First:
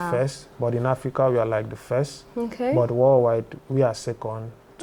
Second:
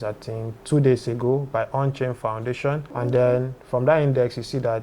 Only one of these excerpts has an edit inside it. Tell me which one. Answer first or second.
second